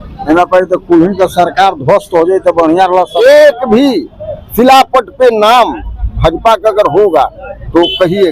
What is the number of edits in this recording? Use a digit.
1